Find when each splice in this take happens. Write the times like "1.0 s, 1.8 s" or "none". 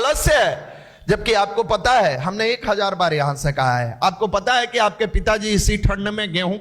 none